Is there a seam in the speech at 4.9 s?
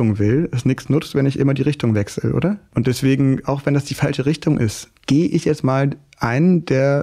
yes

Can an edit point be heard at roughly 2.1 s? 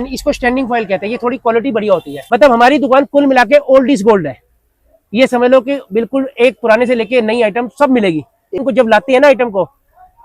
yes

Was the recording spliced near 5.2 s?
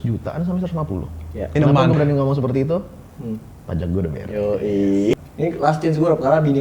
yes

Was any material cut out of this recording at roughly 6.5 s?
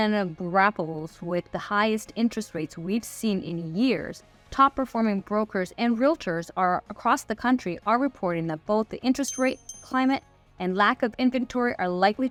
no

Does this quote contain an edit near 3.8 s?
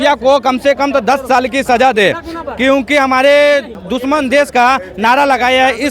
yes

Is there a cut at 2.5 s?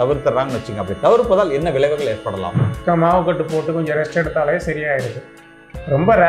yes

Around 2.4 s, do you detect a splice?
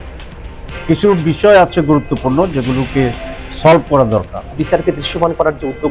no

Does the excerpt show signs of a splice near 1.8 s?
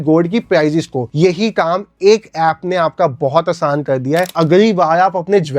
no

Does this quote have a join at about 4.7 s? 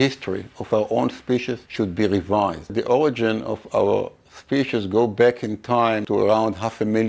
no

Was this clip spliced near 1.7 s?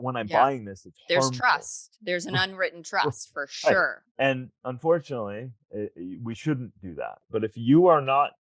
no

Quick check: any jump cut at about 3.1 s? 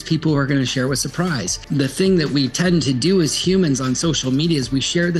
no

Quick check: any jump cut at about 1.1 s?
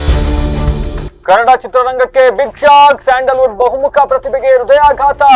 yes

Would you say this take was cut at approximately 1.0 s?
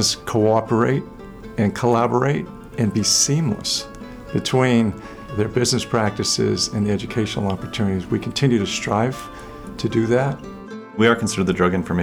no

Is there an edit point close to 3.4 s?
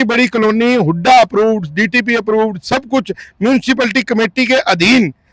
no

